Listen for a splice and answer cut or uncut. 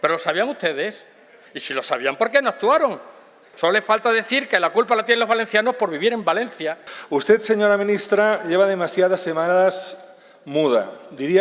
cut